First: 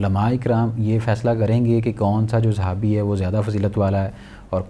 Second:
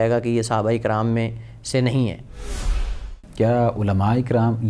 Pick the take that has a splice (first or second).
second